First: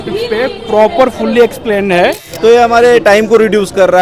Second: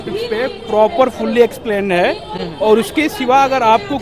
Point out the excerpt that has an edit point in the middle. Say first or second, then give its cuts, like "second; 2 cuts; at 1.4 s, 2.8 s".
first; 1 cut; at 2.2 s